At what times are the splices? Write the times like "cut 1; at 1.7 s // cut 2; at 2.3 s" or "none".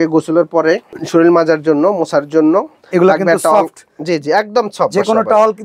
cut 1; at 0.9 s // cut 2; at 2.8 s